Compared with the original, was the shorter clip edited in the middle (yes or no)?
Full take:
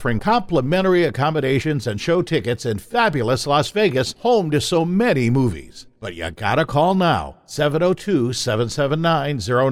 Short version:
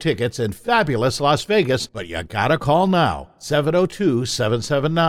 yes